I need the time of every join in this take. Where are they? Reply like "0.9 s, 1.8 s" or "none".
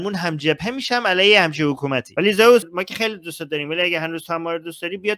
2.1 s, 2.7 s